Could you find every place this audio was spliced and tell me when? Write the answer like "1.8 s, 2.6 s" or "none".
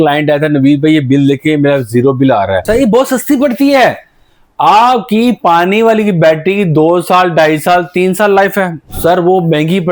2.6 s, 8.8 s